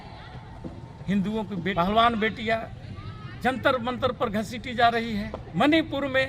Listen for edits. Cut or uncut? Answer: cut